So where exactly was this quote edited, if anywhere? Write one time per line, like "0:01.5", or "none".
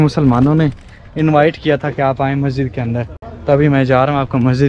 none